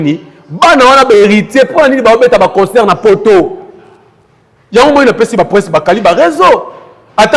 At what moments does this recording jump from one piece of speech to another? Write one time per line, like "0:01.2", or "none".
none